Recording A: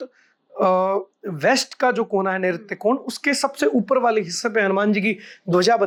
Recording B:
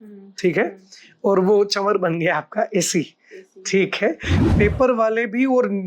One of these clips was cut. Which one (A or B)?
B